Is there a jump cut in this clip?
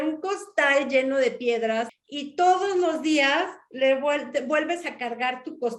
yes; 1 cut; at 1.9 s

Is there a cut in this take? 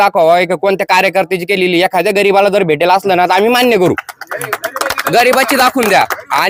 no; 0 cuts

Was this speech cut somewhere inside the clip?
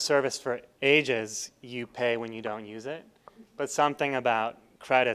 no; 0 cuts

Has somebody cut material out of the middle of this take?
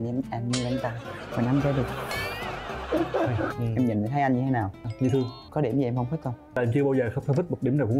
yes; 3 cuts; at 3.6 s, 5.4 s, 6.6 s

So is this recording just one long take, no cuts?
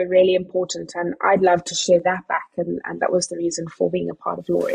yes; 0 cuts

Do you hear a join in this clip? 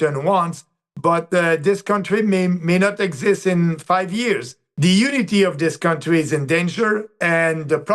yes; 1 cut; at 4.6 s

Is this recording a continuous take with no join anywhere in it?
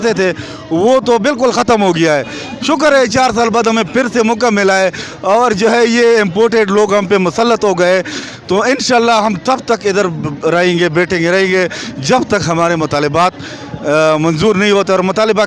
yes; 0 cuts

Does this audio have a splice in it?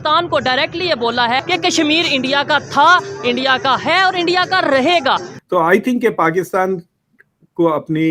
yes; 2 cuts; at 1.4 s, 5.3 s

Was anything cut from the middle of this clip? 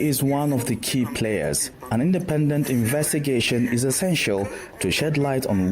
yes; 1 cut; at 1.7 s

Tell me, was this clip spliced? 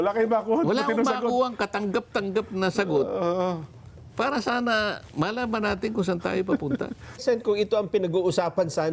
yes; 1 cut; at 7.2 s

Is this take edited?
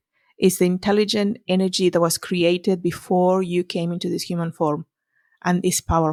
no; 0 cuts

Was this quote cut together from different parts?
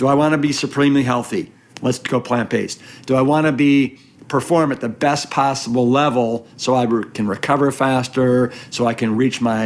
no; 0 cuts

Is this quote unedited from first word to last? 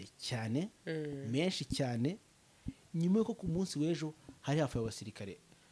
yes; 0 cuts

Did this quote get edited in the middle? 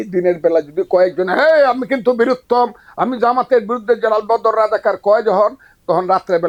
no; 0 cuts

